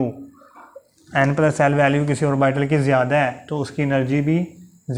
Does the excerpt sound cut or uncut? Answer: uncut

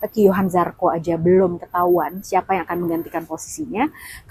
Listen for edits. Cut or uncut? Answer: uncut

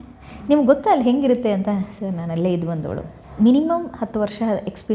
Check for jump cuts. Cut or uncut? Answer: uncut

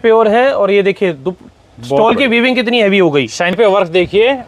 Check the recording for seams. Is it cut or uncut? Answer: cut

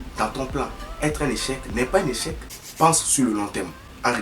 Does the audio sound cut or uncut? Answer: cut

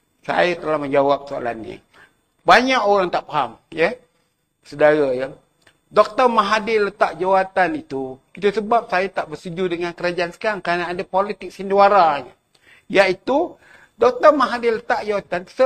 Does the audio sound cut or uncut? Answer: uncut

